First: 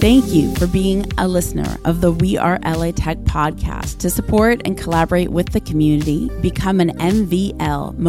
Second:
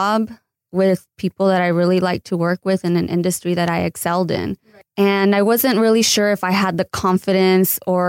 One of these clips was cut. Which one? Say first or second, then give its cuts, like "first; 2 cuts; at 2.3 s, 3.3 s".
second; 1 cut; at 4.6 s